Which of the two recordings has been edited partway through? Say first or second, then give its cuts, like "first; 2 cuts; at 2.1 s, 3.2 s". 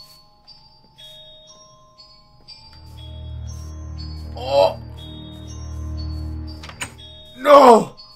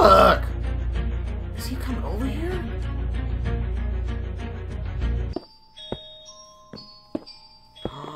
second; 1 cut; at 5.2 s